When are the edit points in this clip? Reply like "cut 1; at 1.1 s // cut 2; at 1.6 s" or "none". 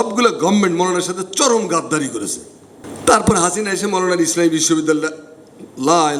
none